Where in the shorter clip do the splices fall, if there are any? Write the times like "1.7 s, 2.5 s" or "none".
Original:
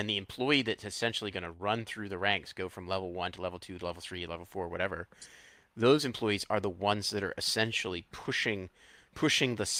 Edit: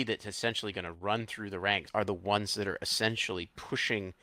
1.9 s